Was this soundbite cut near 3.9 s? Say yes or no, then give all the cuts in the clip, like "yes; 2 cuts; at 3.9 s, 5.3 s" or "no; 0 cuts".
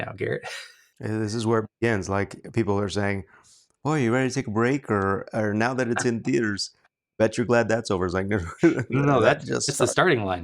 no; 1 cut; at 0.9 s